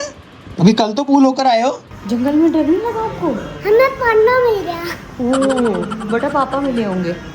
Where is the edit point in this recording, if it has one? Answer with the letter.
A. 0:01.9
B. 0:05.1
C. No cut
A